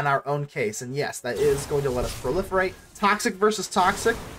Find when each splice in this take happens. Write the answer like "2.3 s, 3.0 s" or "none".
2.8 s